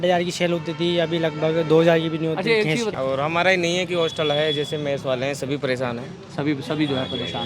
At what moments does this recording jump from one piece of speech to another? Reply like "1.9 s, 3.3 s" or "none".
2.9 s